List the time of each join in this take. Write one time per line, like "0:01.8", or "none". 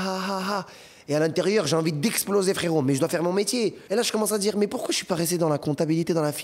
0:03.8